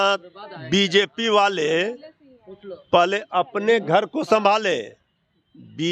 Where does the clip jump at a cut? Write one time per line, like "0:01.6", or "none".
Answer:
none